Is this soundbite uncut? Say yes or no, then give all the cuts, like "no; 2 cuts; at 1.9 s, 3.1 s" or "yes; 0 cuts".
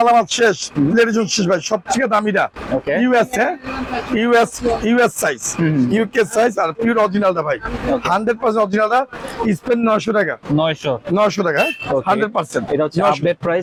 yes; 0 cuts